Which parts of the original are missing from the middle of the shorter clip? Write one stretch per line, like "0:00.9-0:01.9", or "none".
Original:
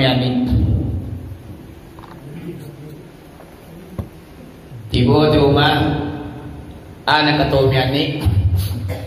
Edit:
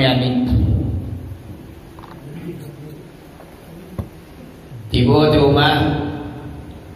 none